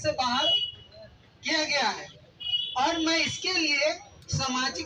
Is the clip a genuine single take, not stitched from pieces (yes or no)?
yes